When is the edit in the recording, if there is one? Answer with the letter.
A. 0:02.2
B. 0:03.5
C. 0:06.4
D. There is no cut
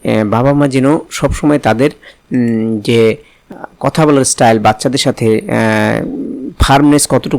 B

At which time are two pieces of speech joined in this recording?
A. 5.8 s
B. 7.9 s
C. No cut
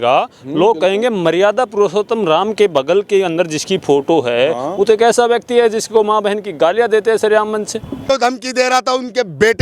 B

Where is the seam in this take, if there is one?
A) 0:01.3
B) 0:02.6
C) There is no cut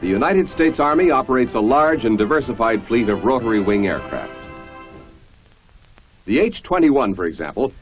B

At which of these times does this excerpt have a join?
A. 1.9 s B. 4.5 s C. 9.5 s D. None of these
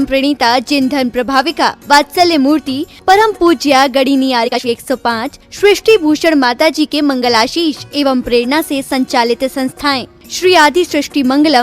B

